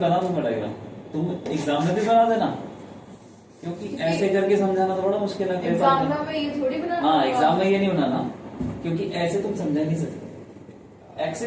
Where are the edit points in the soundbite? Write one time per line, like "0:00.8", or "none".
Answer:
none